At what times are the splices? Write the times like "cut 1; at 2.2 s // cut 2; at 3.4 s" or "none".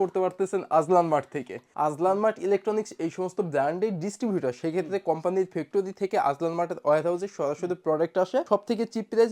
cut 1; at 1.6 s